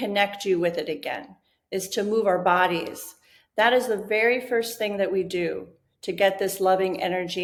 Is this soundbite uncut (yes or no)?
yes